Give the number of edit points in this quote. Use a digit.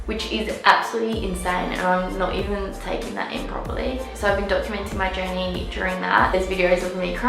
1